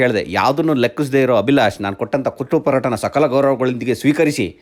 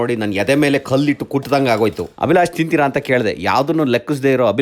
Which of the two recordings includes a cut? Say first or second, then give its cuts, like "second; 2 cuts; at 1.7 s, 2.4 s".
second; 1 cut; at 2.1 s